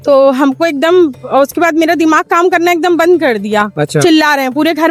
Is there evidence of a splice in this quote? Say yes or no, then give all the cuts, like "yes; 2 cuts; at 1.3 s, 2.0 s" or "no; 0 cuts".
no; 0 cuts